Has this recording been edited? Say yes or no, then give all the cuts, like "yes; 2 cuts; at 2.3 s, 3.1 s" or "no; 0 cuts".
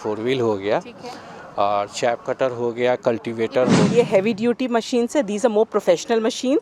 yes; 1 cut; at 3.9 s